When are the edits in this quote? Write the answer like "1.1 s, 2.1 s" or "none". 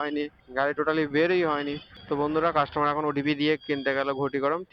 1.9 s